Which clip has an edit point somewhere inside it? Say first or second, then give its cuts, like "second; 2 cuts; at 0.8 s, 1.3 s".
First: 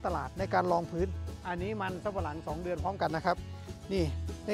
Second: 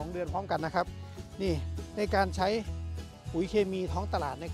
first; 1 cut; at 1.2 s